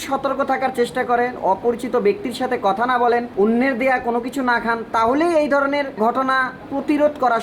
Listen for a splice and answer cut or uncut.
cut